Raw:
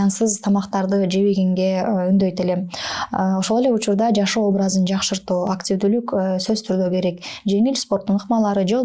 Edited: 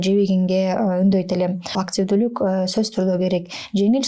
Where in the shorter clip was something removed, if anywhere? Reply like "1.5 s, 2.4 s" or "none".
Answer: 1.8 s